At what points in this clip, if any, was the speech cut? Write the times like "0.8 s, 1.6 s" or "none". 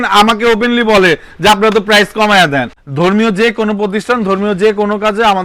2.8 s